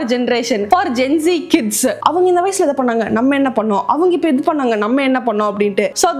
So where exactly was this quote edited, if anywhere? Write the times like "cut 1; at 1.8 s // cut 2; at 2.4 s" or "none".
cut 1; at 2.0 s